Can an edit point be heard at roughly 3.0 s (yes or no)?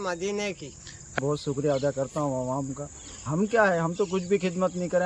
no